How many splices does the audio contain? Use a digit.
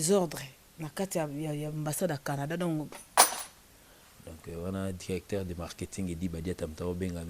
1